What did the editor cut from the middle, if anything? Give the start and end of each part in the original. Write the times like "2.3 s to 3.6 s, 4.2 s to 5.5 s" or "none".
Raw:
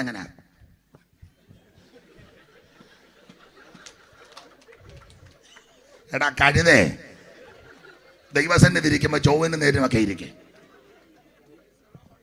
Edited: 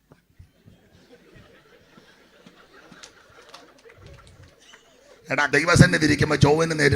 6.3 s to 8.3 s